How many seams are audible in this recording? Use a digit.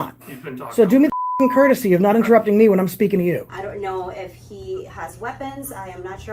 1